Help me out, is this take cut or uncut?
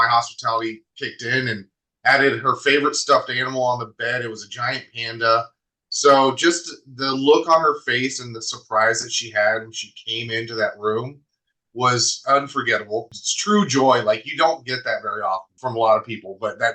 uncut